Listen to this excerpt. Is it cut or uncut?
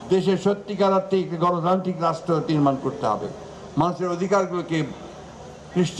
uncut